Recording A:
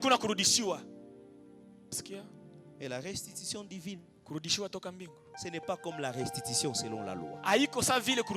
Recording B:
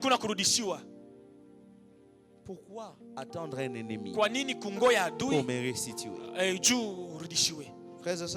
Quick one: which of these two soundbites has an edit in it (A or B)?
A